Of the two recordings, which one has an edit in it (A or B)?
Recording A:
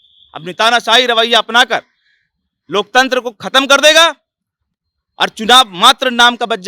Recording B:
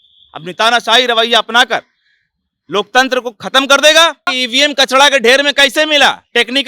B